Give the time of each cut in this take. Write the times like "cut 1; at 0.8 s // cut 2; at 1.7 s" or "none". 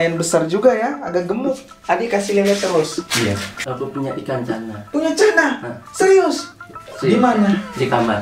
cut 1; at 3.6 s